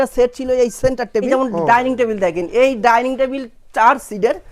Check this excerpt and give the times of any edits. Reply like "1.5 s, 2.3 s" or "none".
1.3 s